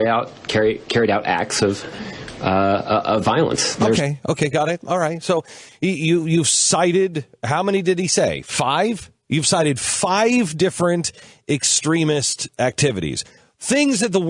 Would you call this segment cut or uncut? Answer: uncut